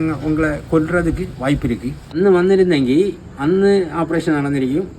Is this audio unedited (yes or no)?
no